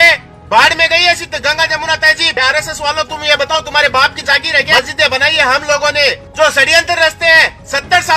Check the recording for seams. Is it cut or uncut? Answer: cut